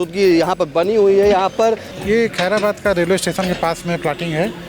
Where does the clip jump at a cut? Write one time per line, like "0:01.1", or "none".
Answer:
0:01.9